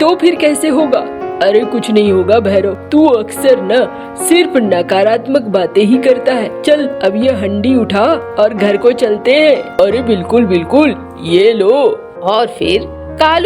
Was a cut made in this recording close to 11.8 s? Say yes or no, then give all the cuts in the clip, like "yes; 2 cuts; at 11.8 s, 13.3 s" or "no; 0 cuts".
no; 1 cut; at 9.8 s